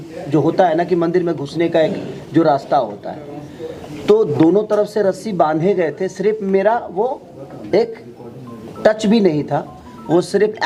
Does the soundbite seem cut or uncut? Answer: uncut